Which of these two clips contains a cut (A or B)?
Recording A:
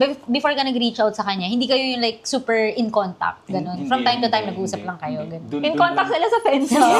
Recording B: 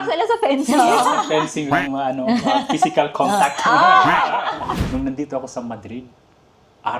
B